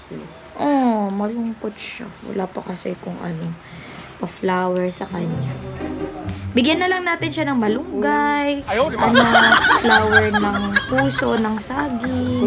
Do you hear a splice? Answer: no; 0 cuts

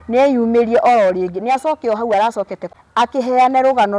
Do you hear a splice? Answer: yes; 1 cut; at 3.1 s

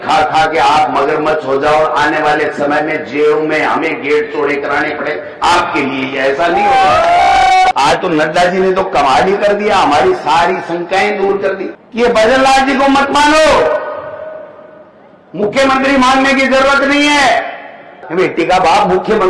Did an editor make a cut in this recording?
yes; 3 cuts; at 7.7 s, 11.8 s, 18.0 s

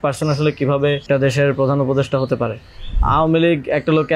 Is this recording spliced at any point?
yes; 2 cuts; at 1.0 s, 3.0 s

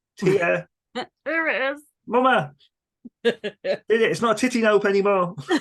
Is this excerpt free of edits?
yes; 0 cuts

